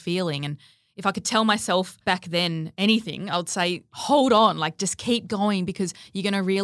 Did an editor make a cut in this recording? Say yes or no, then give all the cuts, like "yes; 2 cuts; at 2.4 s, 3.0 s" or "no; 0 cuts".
yes; 2 cuts; at 2.1 s, 3.9 s